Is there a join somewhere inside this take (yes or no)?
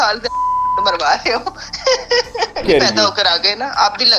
yes